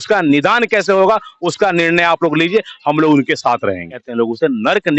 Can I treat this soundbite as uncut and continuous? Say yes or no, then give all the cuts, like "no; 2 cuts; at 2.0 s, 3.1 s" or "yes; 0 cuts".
no; 1 cut; at 4.0 s